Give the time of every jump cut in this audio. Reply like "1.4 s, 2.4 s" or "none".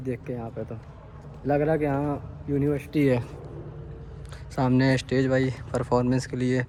none